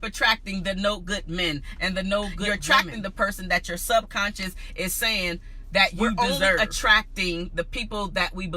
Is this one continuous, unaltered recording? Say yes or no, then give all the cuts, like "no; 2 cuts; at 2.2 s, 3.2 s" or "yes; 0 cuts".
no; 2 cuts; at 2.4 s, 6.6 s